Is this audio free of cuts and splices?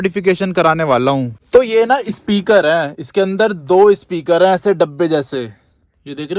no; 1 cut; at 1.4 s

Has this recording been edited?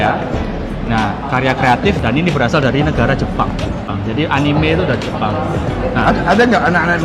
no; 0 cuts

